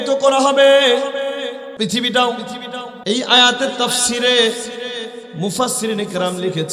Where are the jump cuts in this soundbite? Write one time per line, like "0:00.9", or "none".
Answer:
0:01.6
0:02.9

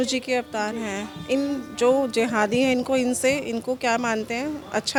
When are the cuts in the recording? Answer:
none

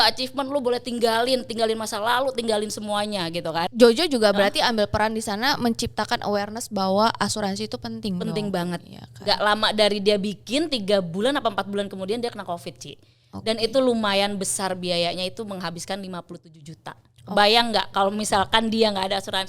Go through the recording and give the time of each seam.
0:03.7

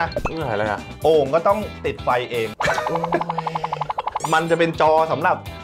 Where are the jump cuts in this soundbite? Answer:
0:02.6
0:04.2

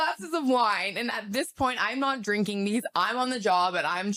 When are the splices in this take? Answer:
none

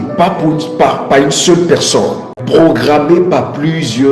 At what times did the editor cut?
0:02.4

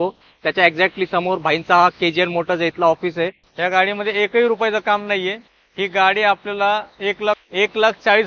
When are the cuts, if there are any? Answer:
0:03.4
0:07.4

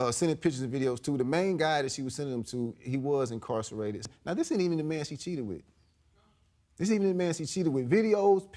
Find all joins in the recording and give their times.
0:04.0

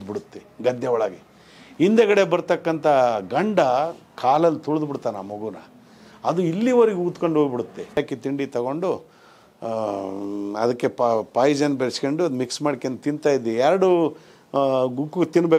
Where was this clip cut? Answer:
0:08.0

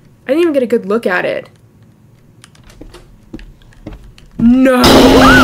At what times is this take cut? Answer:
none

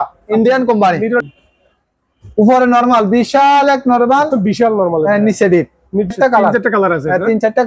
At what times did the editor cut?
0:01.2
0:06.1

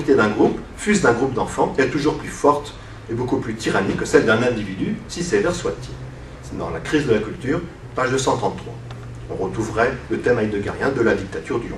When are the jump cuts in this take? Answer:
0:03.6

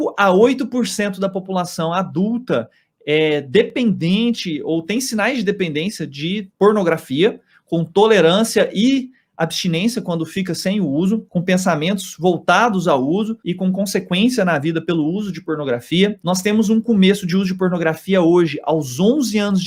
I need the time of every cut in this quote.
none

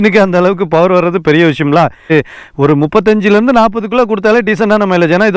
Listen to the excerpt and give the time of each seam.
0:02.1

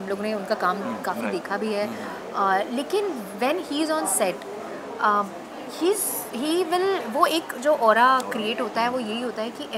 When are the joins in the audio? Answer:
none

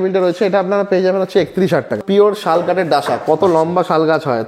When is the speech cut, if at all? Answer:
0:02.0

